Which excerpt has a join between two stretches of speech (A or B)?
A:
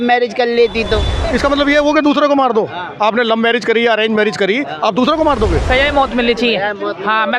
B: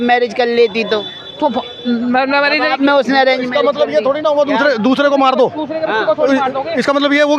A